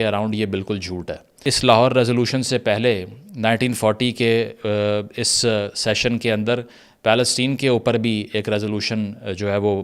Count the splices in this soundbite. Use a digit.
1